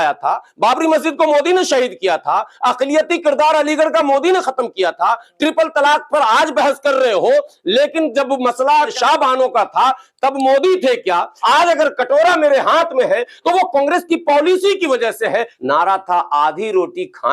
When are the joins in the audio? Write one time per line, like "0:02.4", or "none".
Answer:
0:08.9
0:11.3
0:15.5

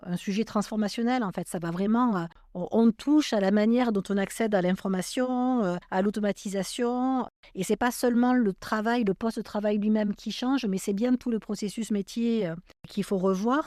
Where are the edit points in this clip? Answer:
none

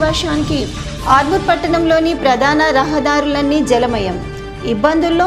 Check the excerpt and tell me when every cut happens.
none

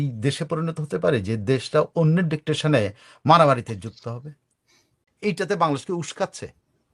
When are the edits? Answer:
0:05.0

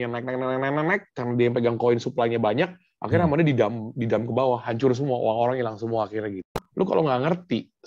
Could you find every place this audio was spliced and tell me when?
0:06.6

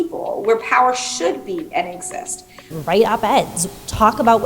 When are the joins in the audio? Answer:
0:02.7

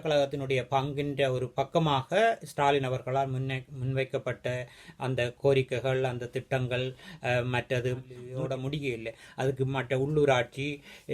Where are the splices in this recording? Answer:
0:08.3

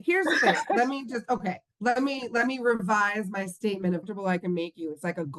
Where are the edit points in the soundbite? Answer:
0:04.0

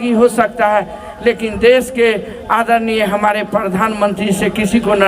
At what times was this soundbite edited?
none

